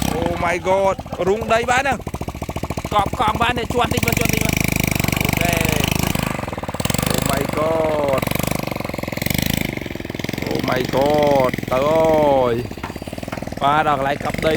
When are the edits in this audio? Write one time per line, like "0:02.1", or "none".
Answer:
0:06.1